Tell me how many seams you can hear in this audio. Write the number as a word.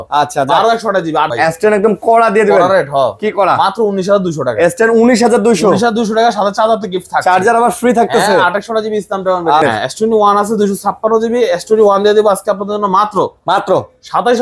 two